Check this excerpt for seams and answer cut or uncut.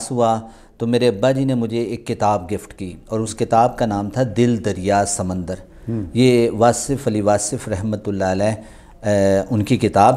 uncut